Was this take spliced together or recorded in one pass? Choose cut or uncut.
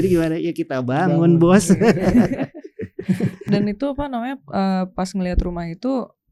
uncut